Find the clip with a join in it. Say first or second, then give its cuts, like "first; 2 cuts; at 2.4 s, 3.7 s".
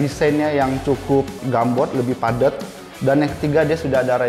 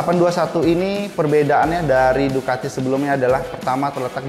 first; 1 cut; at 1.4 s